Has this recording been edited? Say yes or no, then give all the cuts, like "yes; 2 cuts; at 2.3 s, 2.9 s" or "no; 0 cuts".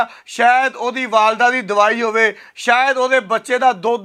no; 0 cuts